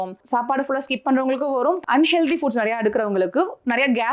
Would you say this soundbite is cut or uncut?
uncut